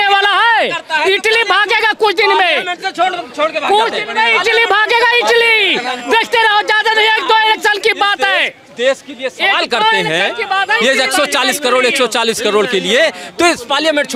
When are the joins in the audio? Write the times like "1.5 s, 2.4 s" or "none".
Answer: none